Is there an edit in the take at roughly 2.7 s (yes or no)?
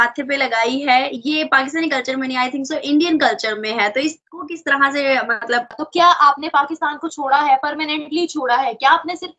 no